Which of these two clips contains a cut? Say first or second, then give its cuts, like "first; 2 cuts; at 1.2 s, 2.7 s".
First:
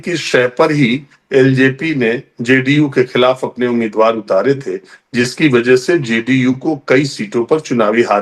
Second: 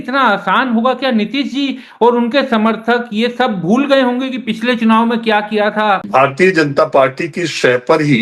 second; 1 cut; at 6.0 s